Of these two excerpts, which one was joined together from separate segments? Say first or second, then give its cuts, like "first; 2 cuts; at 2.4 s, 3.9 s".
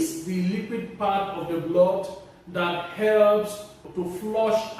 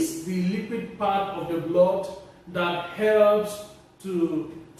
first; 1 cut; at 3.9 s